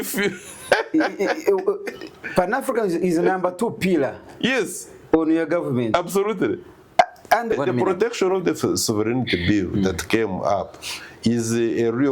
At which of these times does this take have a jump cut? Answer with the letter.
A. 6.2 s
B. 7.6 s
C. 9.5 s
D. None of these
B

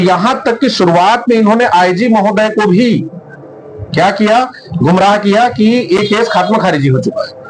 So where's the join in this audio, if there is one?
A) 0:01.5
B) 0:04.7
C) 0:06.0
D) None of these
D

